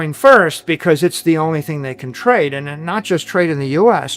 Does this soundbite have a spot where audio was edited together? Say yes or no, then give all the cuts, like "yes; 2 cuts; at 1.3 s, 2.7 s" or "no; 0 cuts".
no; 0 cuts